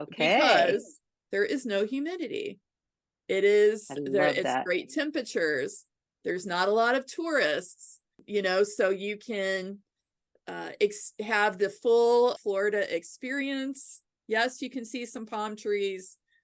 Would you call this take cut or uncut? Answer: uncut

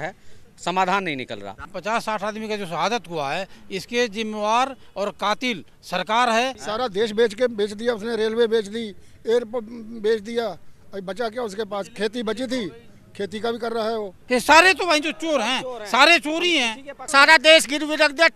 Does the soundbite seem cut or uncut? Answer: cut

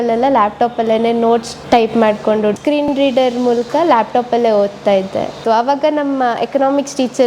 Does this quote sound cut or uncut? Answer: cut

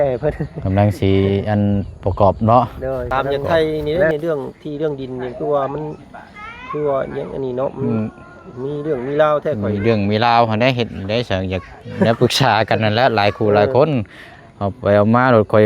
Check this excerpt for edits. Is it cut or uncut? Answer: cut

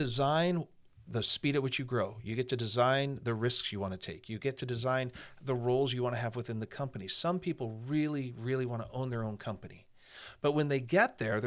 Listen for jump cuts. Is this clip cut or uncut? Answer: cut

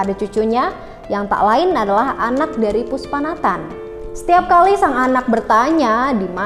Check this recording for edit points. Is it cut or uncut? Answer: uncut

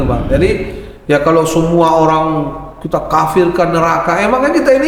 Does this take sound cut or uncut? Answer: uncut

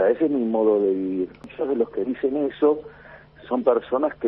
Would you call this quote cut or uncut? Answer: cut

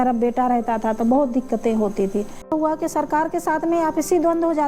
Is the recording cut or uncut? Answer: cut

